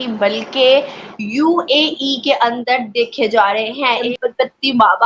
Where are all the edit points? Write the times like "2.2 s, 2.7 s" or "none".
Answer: 4.0 s